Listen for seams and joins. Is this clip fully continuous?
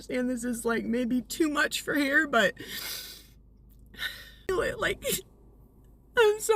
no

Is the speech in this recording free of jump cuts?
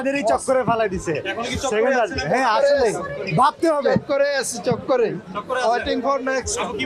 yes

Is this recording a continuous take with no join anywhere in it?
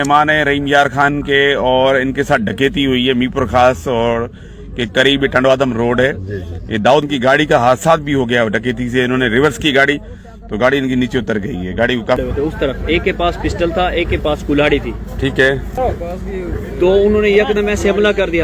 no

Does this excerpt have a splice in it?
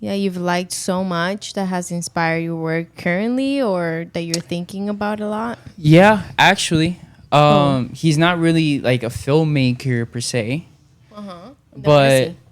no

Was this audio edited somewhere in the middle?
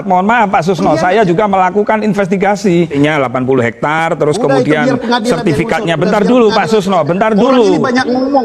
yes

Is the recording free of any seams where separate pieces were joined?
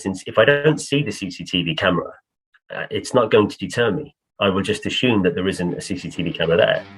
yes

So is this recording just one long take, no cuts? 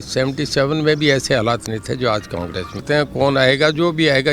no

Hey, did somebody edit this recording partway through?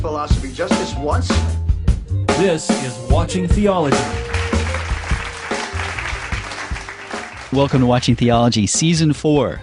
yes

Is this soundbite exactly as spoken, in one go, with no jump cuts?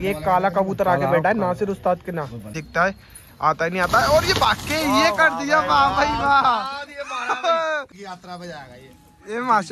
no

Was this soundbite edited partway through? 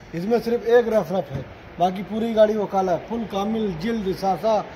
no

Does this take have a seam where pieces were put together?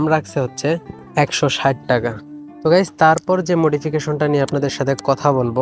no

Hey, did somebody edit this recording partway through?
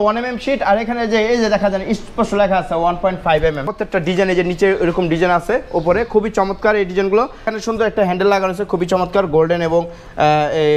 yes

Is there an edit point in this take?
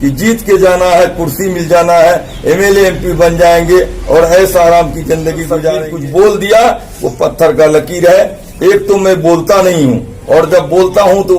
yes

